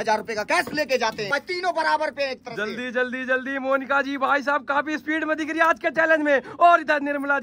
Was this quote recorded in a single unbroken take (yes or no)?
no